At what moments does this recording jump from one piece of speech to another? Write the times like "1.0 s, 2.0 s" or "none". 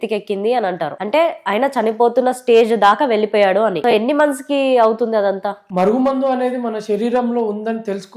3.8 s, 5.6 s